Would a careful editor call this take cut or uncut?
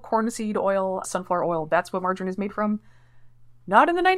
uncut